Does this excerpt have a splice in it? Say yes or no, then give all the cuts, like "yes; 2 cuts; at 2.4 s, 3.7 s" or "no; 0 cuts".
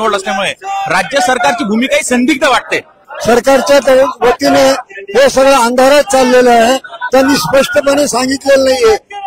yes; 1 cut; at 3.1 s